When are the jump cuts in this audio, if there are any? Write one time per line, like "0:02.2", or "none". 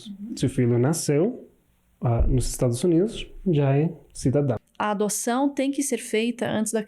0:04.6